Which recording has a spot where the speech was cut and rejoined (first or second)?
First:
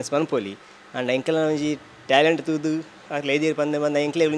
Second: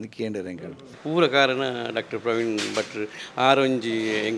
second